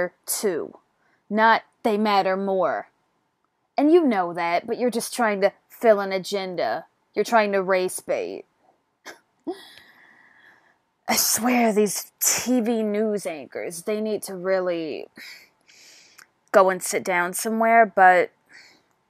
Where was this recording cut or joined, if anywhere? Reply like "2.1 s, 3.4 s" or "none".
13.5 s